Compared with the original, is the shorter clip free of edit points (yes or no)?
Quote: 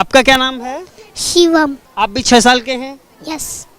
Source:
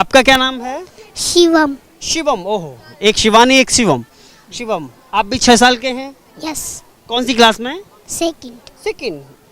no